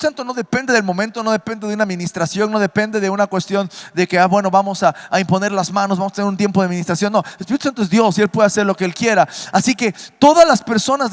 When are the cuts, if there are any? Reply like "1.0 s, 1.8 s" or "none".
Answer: none